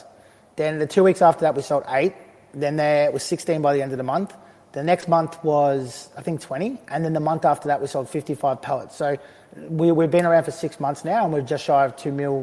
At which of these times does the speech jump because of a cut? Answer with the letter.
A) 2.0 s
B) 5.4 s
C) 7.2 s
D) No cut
D